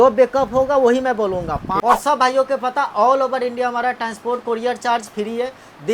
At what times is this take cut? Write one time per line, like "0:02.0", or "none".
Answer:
0:01.7